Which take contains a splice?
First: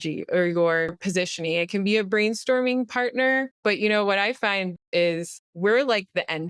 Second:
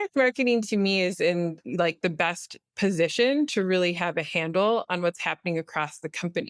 first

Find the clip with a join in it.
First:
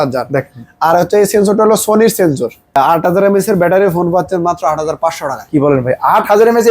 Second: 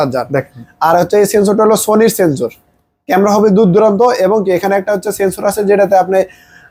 first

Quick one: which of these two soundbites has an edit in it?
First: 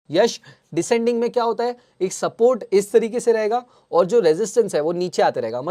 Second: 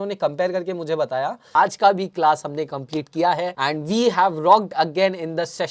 second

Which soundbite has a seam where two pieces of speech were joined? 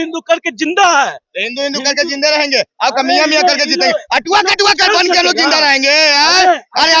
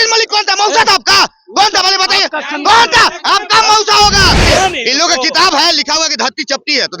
second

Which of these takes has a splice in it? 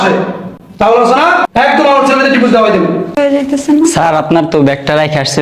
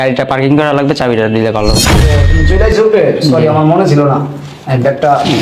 first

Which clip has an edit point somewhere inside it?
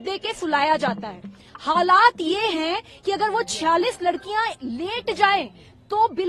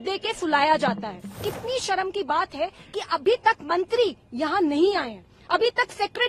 second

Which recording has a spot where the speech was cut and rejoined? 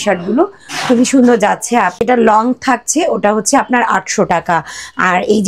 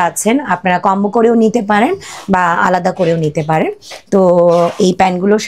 first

